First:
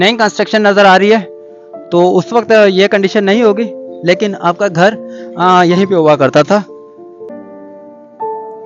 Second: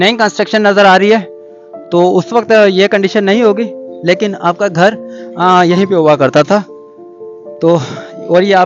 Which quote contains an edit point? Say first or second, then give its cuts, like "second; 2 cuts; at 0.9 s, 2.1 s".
first; 1 cut; at 7.4 s